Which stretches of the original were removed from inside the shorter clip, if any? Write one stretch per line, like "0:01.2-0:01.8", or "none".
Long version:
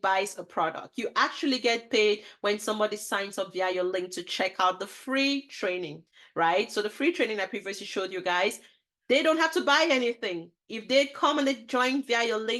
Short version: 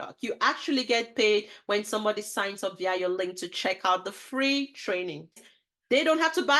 0:06.2-0:08.7